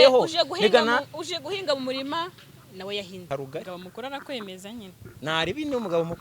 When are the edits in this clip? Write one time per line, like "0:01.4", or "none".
0:03.3